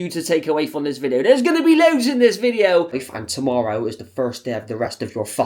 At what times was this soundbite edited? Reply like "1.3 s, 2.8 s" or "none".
2.9 s